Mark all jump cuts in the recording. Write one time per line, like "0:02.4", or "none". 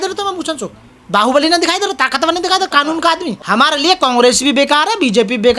0:03.3